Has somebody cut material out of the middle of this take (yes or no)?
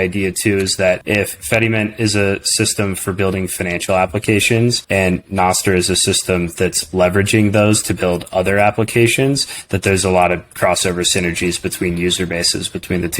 yes